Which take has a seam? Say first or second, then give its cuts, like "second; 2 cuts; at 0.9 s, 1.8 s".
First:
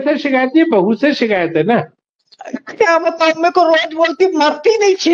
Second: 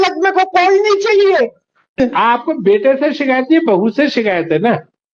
second; 1 cut; at 2.0 s